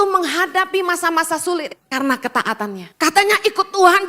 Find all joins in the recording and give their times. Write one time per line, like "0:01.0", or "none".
0:01.8
0:02.8

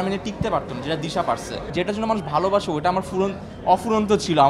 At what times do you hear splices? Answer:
0:01.7

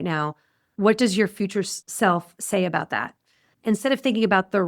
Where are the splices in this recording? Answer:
0:03.6

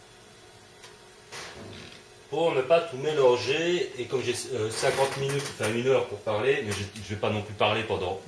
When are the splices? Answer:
0:03.9

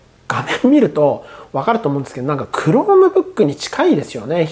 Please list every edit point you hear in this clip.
none

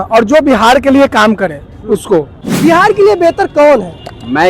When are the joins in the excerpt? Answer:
0:02.4

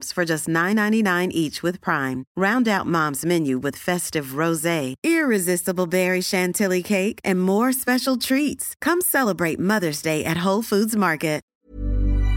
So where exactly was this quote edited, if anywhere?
0:11.4

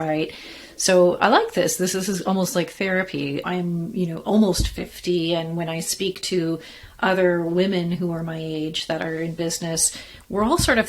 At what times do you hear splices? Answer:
0:01.9
0:03.5

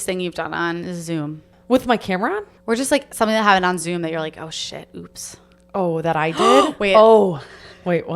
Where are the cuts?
0:01.5
0:02.5

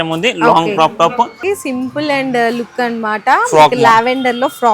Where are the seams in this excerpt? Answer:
0:01.4

